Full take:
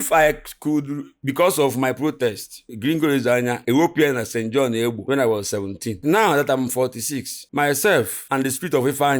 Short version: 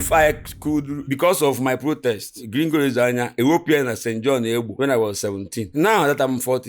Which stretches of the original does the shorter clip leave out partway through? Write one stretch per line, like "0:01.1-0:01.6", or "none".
0:01.0-0:01.2
0:02.5-0:02.6